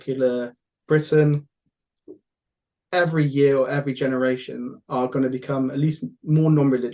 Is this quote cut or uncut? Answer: uncut